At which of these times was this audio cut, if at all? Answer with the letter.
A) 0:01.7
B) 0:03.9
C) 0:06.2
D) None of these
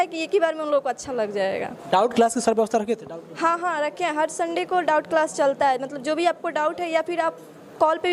D